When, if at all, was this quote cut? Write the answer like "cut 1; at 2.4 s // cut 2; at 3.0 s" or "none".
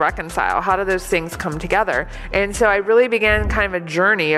cut 1; at 2.2 s